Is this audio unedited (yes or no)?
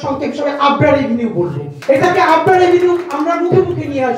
no